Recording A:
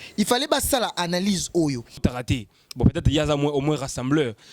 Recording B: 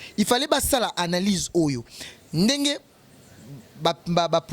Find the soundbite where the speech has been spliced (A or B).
A